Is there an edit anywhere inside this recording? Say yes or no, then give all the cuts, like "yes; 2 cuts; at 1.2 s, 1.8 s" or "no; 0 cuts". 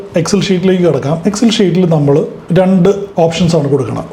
yes; 2 cuts; at 2.4 s, 3.1 s